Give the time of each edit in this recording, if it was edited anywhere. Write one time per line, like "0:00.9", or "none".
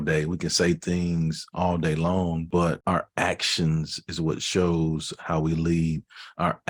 0:02.6